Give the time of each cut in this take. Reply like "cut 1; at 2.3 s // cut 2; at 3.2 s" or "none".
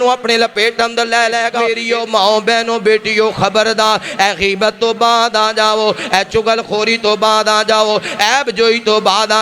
cut 1; at 1.7 s